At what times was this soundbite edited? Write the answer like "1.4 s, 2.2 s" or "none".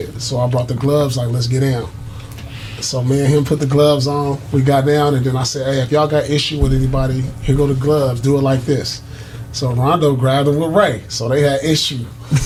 none